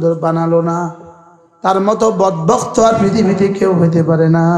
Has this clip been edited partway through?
no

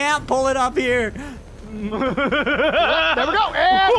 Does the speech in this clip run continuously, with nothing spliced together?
yes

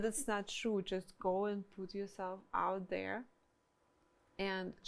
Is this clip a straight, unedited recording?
yes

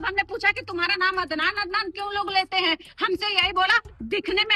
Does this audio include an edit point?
no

